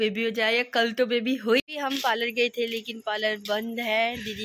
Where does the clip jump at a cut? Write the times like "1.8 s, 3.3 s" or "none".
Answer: 1.6 s